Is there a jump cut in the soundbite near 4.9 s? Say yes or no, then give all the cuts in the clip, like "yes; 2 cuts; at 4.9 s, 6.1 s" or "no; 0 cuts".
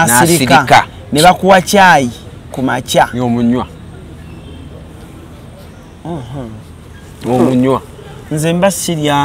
no; 0 cuts